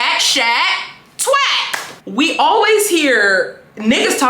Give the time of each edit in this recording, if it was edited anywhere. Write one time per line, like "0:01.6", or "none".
0:02.0